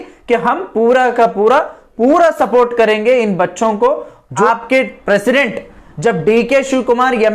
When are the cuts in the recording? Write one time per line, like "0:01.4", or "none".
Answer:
0:04.4